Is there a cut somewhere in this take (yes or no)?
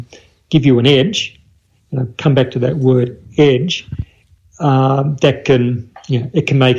no